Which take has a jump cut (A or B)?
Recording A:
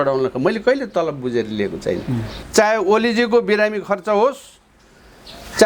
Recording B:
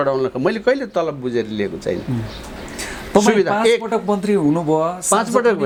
A